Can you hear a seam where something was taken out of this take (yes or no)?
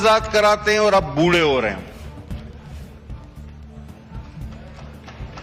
no